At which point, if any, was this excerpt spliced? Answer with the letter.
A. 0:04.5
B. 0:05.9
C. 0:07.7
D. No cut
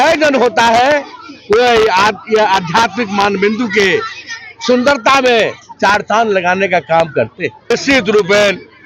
C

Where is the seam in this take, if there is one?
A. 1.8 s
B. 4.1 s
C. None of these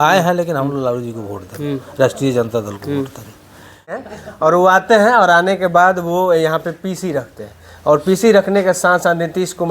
B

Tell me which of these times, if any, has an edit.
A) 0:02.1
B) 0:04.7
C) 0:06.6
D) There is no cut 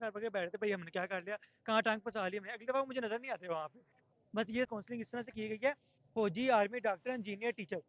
B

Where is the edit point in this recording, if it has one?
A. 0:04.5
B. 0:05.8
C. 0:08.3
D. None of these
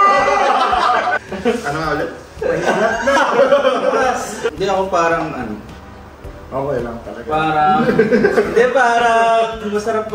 A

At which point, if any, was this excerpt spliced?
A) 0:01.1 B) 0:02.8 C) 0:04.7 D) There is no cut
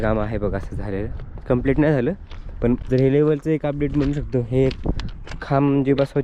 B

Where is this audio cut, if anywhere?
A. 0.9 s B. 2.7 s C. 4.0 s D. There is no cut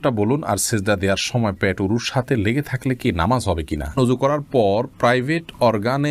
C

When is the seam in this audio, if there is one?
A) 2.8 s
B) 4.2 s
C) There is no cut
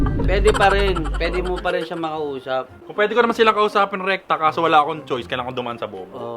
A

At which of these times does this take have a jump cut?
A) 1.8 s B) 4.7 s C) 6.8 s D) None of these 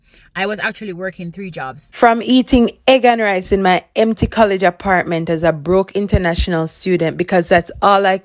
A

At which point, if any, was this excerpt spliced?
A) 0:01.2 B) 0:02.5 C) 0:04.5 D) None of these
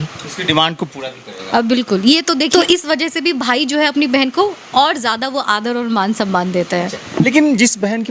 B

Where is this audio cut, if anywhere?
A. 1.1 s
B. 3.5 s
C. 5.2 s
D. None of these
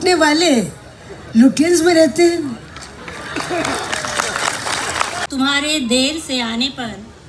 C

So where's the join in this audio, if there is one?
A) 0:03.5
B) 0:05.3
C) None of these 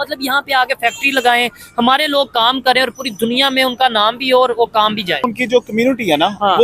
B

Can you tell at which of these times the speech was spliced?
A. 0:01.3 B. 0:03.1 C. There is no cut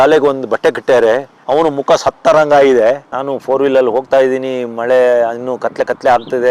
B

